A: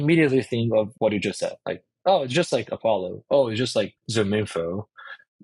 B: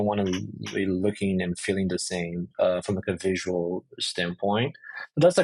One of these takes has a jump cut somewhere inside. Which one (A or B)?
A